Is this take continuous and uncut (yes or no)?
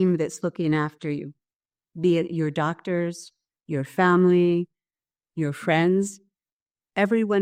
yes